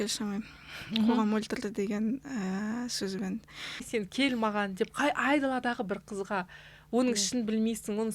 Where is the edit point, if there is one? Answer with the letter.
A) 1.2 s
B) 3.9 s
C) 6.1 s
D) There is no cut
B